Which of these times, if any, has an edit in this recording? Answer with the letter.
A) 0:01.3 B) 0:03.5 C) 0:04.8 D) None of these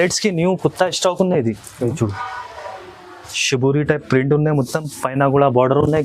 D